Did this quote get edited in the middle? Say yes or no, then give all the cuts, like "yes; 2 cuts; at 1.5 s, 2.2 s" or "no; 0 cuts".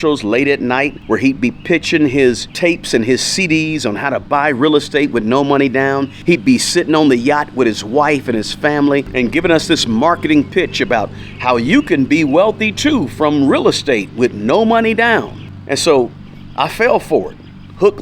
yes; 4 cuts; at 1.0 s, 2.5 s, 6.1 s, 9.1 s